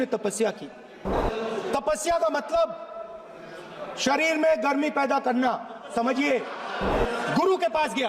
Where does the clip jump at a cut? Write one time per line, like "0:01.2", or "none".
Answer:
0:01.1
0:06.9